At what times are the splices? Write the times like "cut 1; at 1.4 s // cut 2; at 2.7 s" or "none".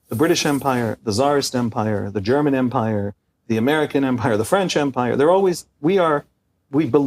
none